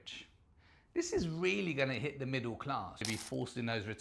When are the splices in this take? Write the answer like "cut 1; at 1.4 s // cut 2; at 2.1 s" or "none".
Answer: cut 1; at 3.0 s